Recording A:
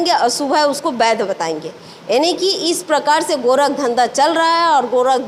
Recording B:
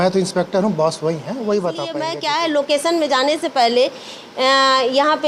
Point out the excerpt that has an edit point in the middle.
B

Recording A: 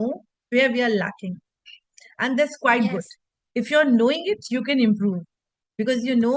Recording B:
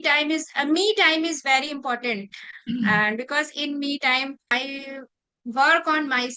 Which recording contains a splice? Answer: B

